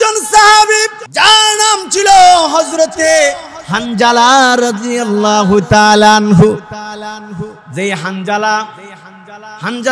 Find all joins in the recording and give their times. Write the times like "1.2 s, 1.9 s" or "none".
1.0 s